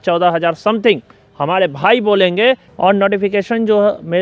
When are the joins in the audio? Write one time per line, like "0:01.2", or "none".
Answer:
0:02.7